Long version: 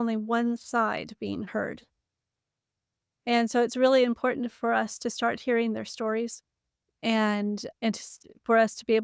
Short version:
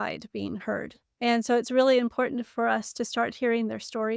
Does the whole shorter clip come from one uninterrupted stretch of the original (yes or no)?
no